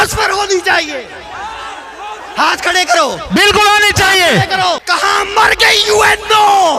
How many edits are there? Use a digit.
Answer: 1